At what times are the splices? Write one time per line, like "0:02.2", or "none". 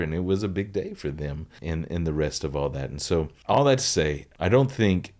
0:01.5
0:03.4
0:04.3